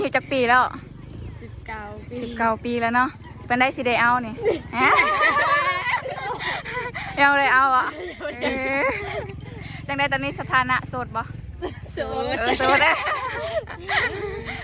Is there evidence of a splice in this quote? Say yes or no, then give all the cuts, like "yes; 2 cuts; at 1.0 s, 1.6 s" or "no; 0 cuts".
no; 0 cuts